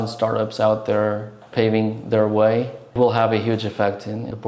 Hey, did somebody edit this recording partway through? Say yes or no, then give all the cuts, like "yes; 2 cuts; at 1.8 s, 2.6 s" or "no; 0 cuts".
no; 0 cuts